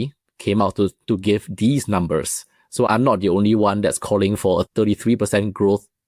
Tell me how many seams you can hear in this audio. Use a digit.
2